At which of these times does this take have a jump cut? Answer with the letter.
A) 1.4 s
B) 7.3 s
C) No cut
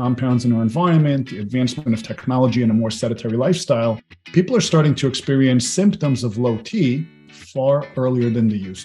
B